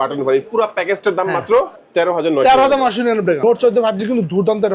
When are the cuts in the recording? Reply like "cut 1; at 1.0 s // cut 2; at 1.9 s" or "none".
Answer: cut 1; at 1.8 s // cut 2; at 3.4 s